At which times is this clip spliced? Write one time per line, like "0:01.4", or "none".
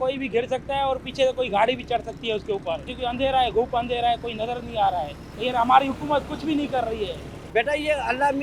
none